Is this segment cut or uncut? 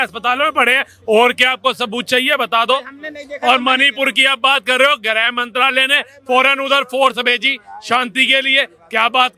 uncut